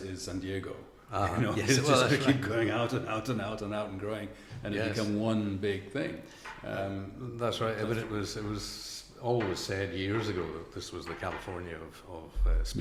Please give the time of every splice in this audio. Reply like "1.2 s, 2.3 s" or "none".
none